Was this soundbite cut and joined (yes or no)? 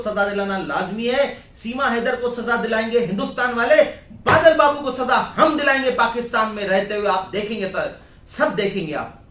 no